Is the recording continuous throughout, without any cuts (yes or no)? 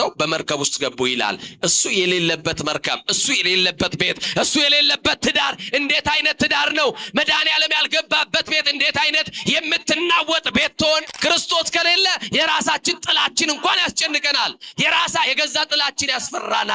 no